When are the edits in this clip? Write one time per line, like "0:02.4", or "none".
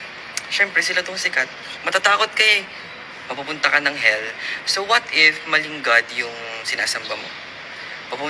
none

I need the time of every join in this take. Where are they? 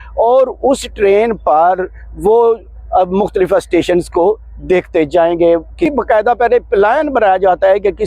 0:05.8

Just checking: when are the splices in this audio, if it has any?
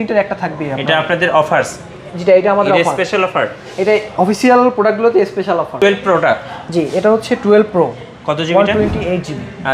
0:05.8

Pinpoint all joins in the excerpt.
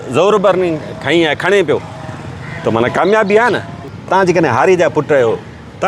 0:03.9

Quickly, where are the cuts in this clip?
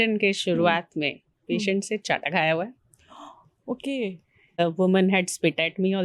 0:04.6

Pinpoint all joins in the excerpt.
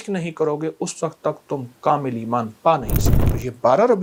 none

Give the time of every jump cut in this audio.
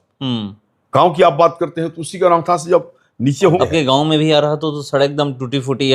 0:03.6

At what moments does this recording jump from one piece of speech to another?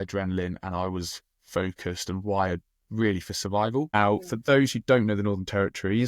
0:03.9

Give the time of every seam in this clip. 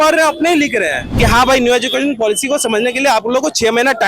0:01.0

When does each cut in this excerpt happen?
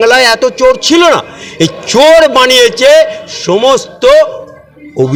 none

